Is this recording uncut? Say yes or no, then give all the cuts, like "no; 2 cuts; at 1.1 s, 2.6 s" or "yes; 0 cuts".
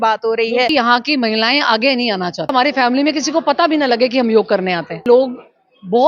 no; 3 cuts; at 0.7 s, 2.5 s, 5.0 s